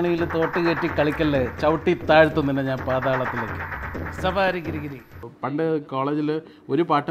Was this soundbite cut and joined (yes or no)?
yes